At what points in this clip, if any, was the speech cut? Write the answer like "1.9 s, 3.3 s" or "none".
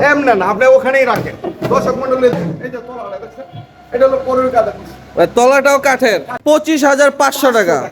6.3 s